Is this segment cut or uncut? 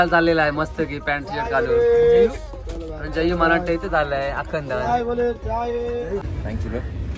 cut